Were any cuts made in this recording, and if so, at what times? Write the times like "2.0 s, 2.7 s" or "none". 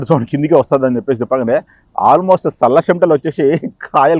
none